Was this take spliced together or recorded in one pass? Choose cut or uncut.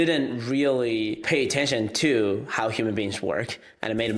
cut